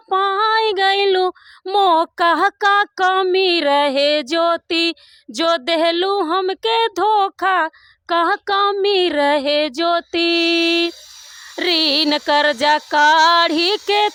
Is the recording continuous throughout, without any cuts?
yes; 0 cuts

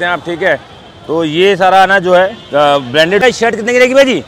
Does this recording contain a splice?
yes; 1 cut; at 3.2 s

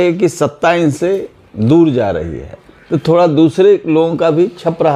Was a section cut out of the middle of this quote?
no; 0 cuts

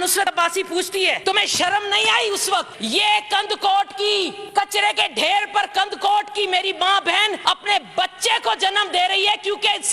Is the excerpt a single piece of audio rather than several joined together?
no; 4 cuts; at 1.2 s, 2.8 s, 4.4 s, 7.4 s

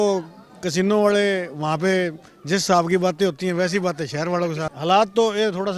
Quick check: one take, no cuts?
no; 1 cut; at 4.7 s

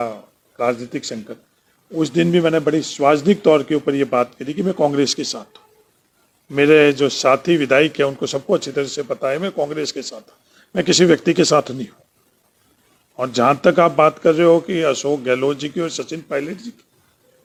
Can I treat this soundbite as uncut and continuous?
yes; 0 cuts

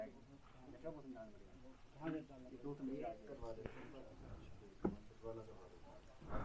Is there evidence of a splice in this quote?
no; 0 cuts

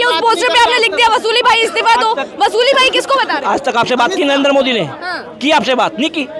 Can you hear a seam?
no; 0 cuts

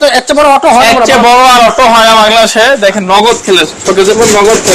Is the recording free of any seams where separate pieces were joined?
yes; 0 cuts

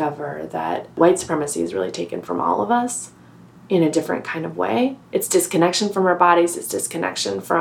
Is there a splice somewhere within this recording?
yes; 2 cuts; at 0.9 s, 5.0 s

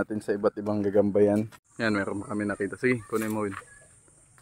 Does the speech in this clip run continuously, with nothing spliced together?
no; 1 cut; at 1.6 s

